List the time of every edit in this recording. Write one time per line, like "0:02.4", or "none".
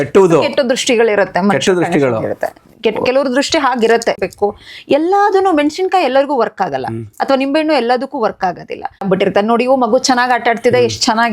0:04.2
0:09.0